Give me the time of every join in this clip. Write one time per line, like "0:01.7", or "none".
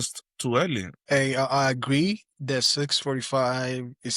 0:00.9